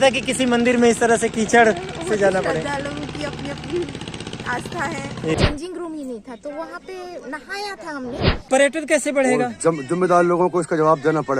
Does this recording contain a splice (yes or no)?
yes